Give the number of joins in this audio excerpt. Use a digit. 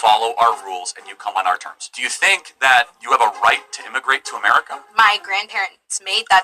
1